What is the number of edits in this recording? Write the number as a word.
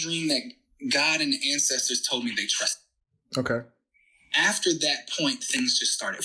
zero